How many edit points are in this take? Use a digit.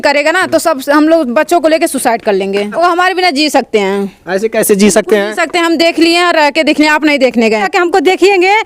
2